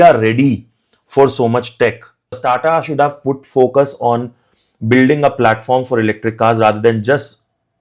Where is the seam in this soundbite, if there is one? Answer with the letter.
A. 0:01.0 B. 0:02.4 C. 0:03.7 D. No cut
B